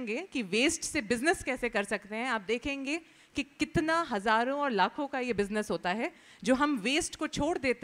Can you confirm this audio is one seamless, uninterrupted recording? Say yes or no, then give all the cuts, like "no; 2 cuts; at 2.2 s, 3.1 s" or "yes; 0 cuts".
yes; 0 cuts